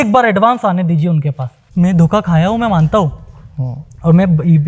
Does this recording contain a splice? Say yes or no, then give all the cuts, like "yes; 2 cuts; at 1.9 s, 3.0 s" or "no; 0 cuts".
yes; 1 cut; at 1.7 s